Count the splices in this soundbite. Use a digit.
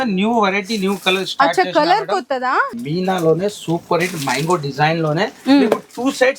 1